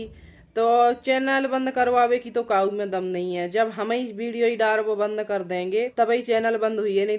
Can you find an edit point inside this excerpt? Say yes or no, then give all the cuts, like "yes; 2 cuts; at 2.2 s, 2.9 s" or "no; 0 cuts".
yes; 1 cut; at 5.9 s